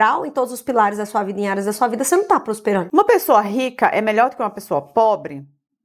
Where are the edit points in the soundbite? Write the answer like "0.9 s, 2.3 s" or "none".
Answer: 2.8 s